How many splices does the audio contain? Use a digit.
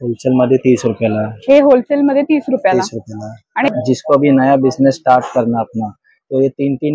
1